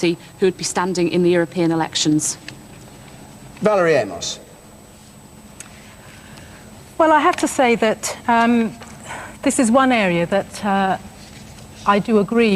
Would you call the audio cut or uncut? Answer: cut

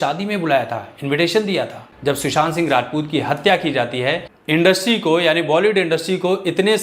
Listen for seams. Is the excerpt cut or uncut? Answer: cut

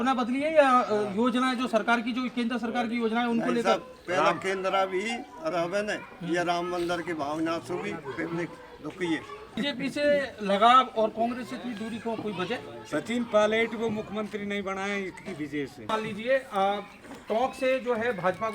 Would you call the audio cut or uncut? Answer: cut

